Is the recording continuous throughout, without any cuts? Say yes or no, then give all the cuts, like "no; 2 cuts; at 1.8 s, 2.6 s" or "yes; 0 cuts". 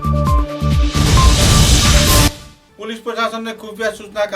no; 1 cut; at 2.4 s